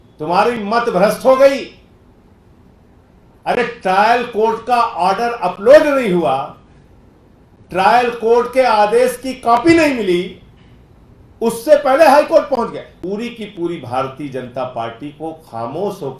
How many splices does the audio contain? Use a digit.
1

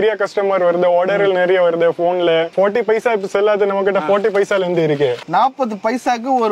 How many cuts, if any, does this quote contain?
2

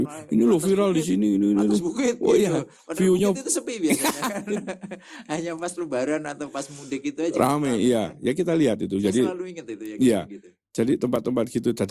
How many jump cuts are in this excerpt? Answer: 0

